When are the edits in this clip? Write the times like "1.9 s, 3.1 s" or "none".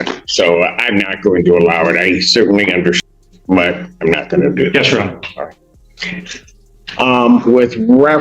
3.0 s